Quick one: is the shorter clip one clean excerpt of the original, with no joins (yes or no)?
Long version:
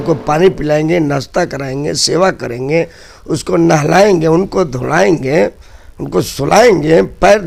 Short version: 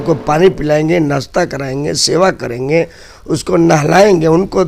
yes